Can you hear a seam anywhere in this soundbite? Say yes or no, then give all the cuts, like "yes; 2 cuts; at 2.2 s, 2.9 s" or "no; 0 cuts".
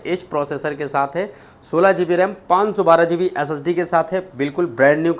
no; 0 cuts